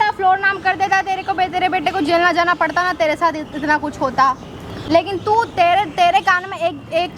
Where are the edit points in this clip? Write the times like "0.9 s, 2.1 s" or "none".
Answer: none